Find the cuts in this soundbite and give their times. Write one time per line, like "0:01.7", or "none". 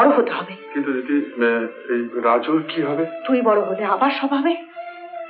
none